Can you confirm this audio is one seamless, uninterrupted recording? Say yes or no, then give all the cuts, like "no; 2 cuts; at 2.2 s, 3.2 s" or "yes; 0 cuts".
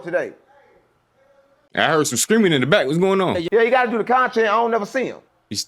no; 2 cuts; at 1.6 s, 3.5 s